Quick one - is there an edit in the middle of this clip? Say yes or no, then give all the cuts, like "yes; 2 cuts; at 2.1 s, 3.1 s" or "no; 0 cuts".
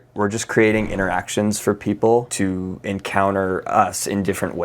yes; 1 cut; at 2.3 s